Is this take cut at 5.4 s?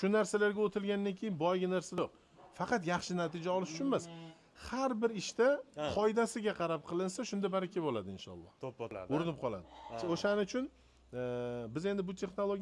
no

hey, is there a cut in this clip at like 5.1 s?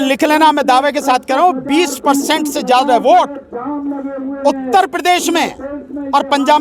no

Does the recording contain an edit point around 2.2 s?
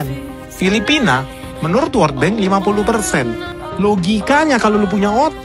no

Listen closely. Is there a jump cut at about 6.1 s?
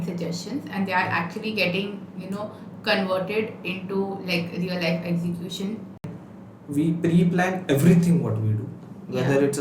yes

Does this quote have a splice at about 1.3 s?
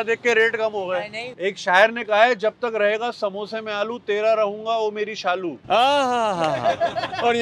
yes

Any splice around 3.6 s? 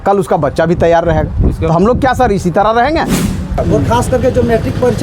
yes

